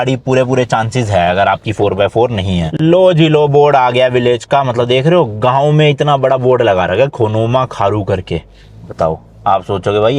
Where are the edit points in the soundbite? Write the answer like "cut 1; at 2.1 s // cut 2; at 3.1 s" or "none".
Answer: cut 1; at 2.8 s